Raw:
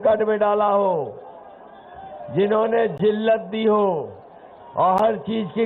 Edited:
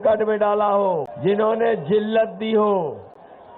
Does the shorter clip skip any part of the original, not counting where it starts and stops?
yes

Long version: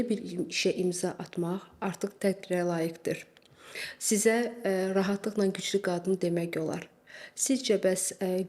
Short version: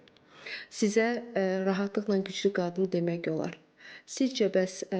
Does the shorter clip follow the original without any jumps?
yes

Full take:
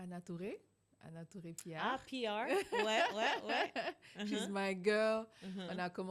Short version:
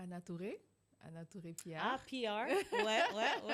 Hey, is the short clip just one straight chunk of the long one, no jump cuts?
yes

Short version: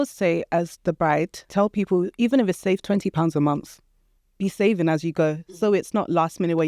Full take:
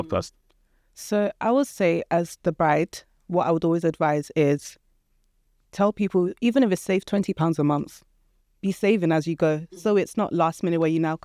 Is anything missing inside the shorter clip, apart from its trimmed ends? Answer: yes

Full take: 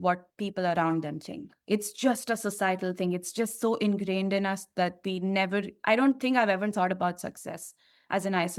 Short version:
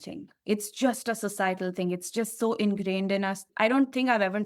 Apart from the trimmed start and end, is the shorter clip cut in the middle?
yes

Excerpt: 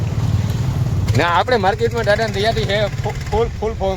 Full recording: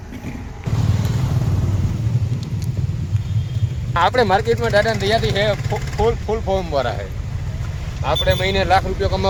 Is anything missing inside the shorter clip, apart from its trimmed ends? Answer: yes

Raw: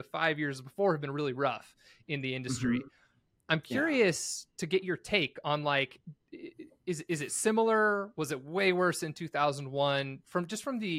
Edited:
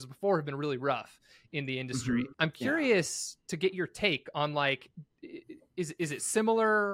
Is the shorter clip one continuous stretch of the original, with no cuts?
no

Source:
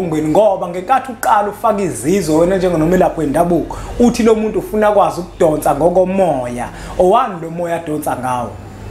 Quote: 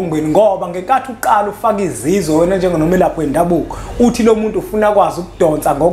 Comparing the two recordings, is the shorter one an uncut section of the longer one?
yes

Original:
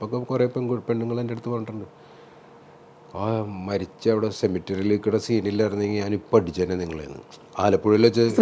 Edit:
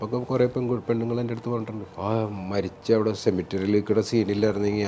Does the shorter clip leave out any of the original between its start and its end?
yes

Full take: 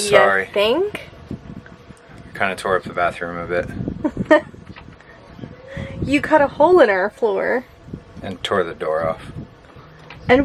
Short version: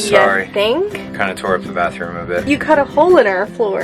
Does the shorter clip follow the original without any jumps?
no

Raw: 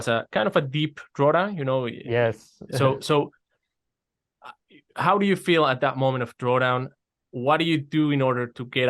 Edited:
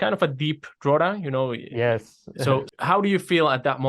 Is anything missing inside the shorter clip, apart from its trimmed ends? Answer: yes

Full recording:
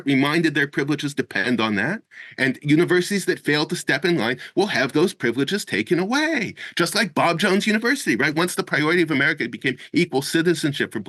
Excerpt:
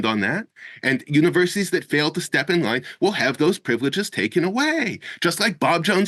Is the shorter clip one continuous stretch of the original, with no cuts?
yes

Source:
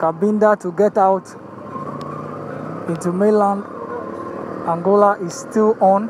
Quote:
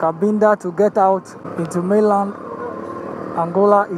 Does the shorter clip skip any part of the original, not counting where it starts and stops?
yes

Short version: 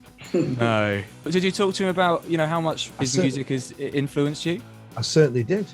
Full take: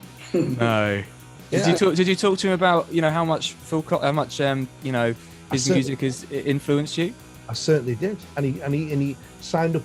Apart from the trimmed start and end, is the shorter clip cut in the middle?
yes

